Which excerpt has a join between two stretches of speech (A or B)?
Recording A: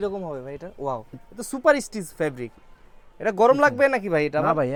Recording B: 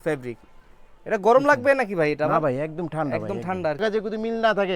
B